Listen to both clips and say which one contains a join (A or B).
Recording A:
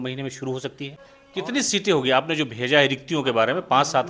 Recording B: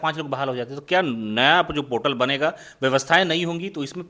A